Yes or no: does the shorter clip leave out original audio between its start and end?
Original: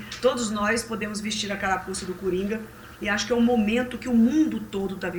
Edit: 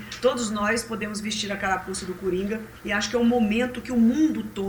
yes